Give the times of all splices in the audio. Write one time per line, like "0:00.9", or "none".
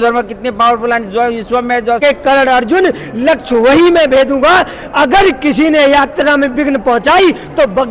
0:02.0